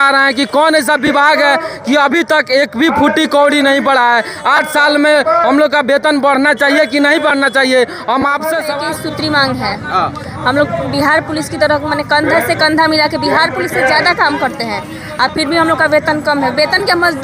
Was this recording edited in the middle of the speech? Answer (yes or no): yes